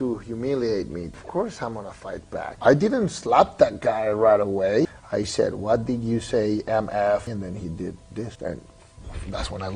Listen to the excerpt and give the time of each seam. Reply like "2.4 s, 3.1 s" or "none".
1.2 s, 2.5 s, 4.9 s, 7.3 s, 8.3 s

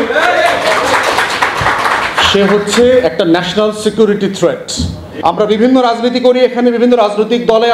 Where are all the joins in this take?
5.1 s

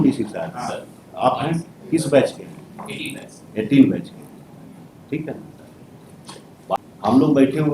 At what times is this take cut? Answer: 6.8 s

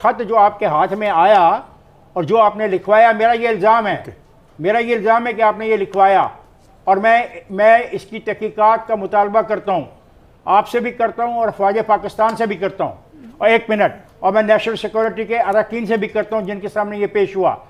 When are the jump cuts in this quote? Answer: none

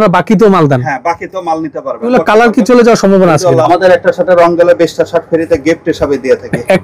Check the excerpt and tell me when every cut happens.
2.1 s, 3.6 s

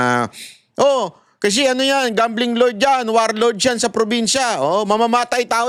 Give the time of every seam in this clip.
none

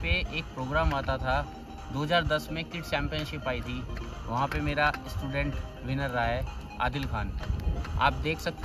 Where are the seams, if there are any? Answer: none

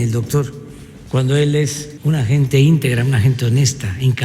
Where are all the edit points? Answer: 1.9 s

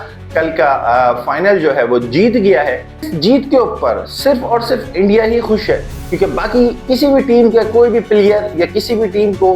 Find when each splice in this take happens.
3.1 s

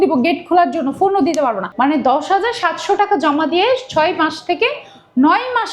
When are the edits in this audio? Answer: 1.7 s

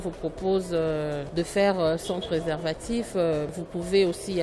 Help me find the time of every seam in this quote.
1.2 s, 3.5 s

